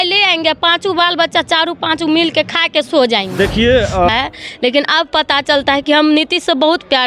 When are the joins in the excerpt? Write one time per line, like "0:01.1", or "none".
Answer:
0:04.1